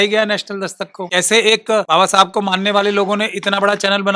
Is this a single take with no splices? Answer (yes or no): no